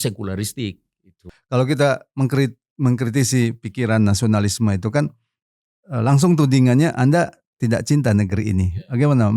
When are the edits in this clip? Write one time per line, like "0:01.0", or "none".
0:01.3